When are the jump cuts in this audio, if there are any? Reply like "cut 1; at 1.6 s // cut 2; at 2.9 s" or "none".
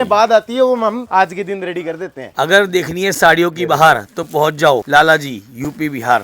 cut 1; at 1.0 s // cut 2; at 2.3 s // cut 3; at 4.9 s

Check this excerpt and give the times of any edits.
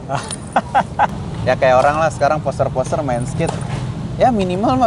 cut 1; at 1.1 s

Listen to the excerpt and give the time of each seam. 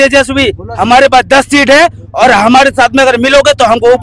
none

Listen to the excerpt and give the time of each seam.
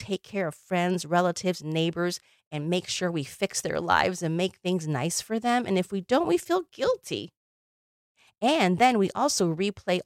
none

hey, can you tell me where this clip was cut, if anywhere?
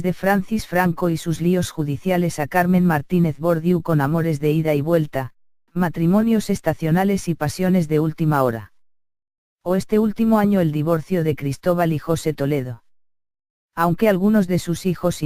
cut 1; at 8.0 s

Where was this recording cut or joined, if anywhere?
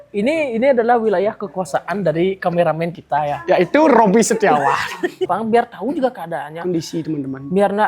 cut 1; at 5.3 s

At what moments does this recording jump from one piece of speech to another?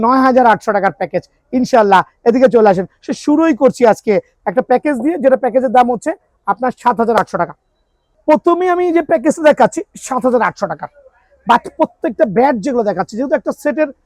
none

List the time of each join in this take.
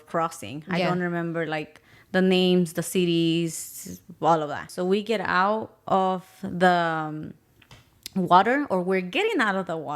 cut 1; at 4.7 s

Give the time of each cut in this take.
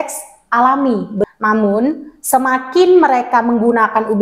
cut 1; at 1.2 s

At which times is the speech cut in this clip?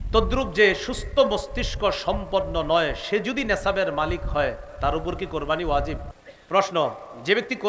cut 1; at 6.1 s

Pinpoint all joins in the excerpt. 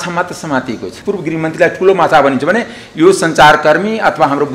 cut 1; at 1.0 s

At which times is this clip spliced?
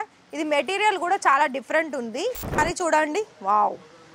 cut 1; at 2.6 s

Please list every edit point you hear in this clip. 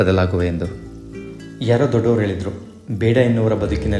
none

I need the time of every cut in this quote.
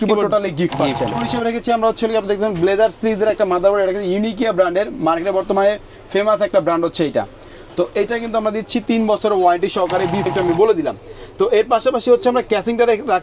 cut 1; at 1.2 s // cut 2; at 10.3 s

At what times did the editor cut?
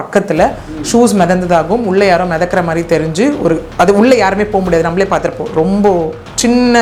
none

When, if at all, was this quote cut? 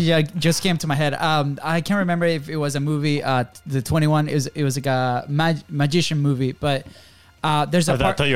none

